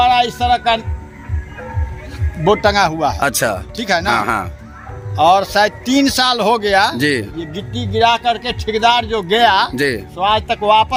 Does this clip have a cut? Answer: no; 0 cuts

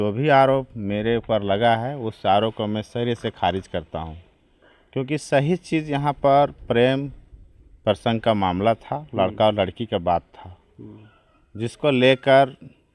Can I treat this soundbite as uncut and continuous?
yes; 0 cuts

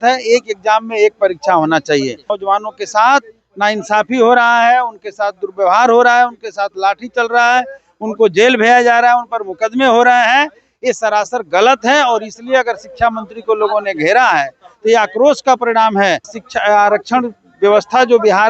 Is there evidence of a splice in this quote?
yes; 2 cuts; at 2.3 s, 16.3 s

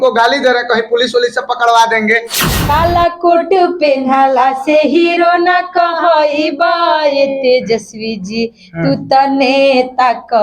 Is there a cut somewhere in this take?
yes; 1 cut; at 2.5 s

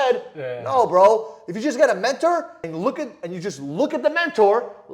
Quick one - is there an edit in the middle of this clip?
yes; 1 cut; at 2.6 s

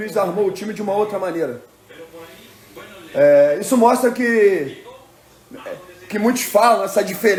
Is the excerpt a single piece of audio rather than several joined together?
yes; 0 cuts

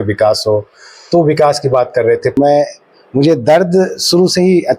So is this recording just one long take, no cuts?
no; 1 cut; at 2.3 s

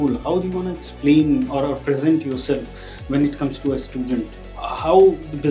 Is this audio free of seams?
yes; 0 cuts

